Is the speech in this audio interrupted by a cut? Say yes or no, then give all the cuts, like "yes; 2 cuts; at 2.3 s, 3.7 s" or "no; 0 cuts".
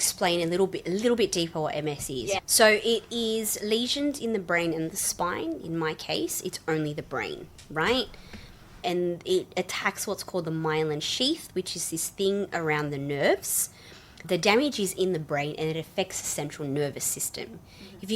yes; 3 cuts; at 2.4 s, 8.8 s, 14.3 s